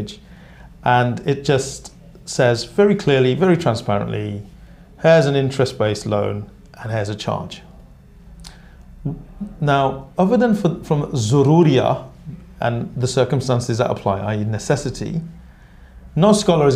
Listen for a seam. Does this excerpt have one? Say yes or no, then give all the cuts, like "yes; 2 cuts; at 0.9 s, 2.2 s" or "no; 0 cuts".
no; 0 cuts